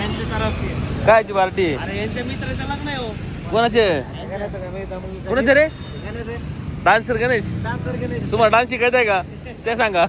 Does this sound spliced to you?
no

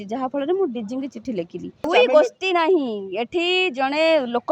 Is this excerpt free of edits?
no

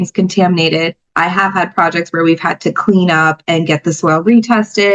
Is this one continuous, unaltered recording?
yes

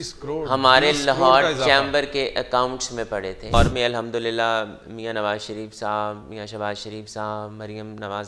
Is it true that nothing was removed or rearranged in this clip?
no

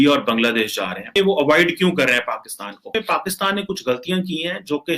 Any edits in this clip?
yes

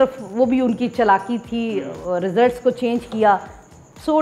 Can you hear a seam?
no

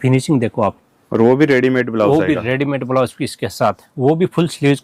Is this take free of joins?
yes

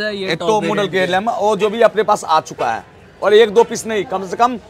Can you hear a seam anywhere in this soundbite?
no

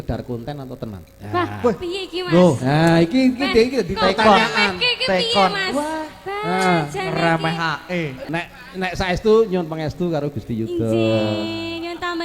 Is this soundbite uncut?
no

